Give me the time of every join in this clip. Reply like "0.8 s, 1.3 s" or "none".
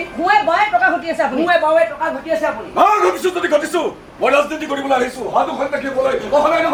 none